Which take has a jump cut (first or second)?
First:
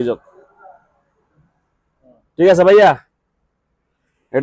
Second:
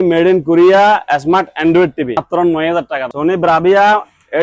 second